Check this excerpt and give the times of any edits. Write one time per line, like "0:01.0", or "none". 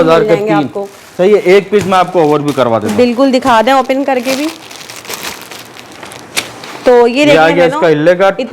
none